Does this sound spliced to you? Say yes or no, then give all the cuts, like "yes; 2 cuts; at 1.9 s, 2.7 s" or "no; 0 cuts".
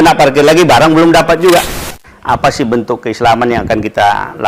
yes; 1 cut; at 1.9 s